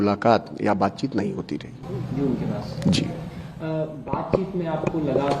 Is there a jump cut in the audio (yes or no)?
no